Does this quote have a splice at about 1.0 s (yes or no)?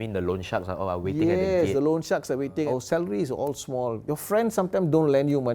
no